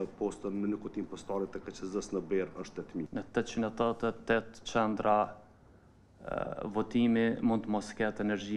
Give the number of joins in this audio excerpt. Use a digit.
1